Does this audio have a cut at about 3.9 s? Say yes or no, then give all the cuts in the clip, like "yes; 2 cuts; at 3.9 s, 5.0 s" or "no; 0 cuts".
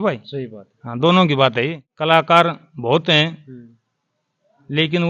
no; 1 cut; at 1.8 s